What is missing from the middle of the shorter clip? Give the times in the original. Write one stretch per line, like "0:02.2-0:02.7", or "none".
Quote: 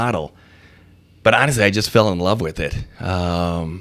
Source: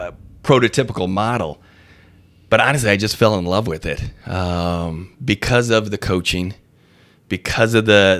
none